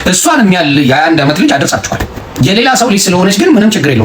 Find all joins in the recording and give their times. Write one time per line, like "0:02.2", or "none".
0:02.2